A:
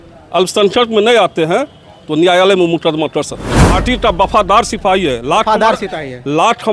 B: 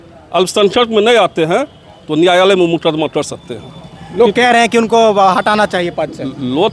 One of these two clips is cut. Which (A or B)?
A